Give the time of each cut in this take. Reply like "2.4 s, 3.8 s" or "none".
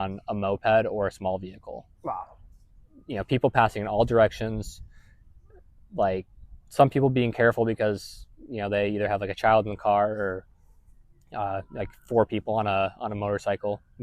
none